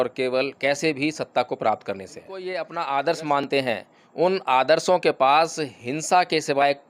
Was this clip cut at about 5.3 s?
no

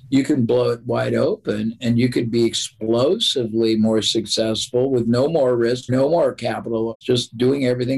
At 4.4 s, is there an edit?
no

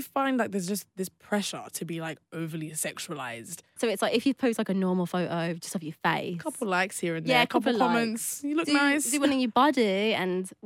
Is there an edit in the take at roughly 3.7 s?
yes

